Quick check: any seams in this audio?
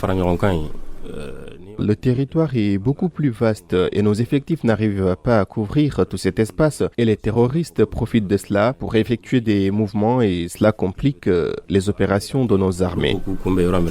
yes; 1 cut; at 1.7 s

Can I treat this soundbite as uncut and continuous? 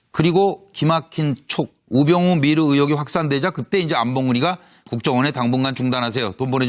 no; 1 cut; at 3.9 s

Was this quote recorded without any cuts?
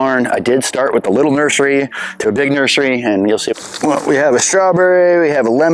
no; 1 cut; at 3.5 s

